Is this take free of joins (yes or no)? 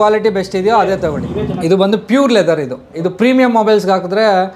no